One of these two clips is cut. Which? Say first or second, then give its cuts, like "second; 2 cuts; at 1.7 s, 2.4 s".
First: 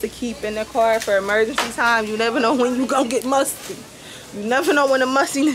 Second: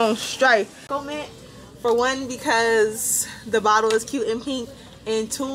second; 1 cut; at 0.9 s